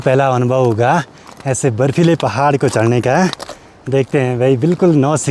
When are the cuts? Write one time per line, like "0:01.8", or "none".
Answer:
none